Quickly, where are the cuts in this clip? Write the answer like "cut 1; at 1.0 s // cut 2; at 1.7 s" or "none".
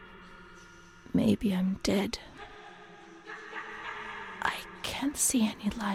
none